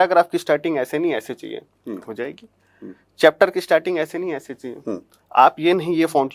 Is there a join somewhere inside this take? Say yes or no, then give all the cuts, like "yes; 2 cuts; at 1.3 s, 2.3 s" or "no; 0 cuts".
no; 0 cuts